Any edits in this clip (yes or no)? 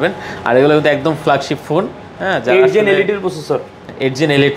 no